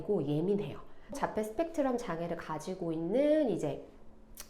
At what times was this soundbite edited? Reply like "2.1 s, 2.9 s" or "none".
1.2 s